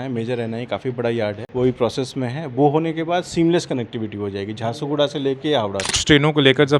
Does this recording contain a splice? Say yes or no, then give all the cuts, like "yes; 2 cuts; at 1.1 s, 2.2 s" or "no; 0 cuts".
yes; 2 cuts; at 1.4 s, 6.0 s